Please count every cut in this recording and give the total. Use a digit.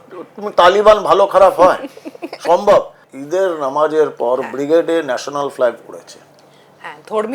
1